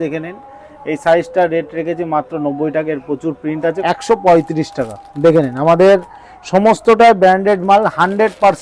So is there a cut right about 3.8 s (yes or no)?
yes